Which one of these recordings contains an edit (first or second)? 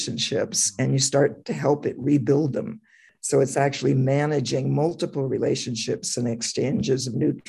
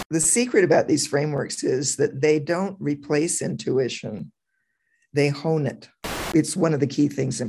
second